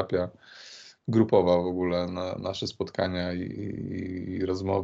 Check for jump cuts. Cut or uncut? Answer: uncut